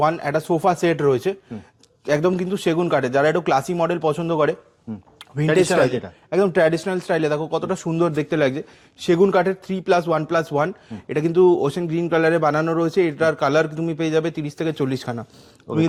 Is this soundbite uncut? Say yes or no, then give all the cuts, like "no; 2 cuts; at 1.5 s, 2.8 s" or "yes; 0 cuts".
yes; 0 cuts